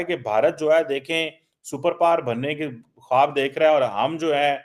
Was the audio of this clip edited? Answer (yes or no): no